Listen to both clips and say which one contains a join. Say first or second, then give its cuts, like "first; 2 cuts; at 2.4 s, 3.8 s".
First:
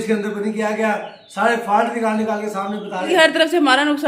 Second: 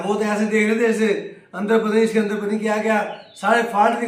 first; 1 cut; at 3.1 s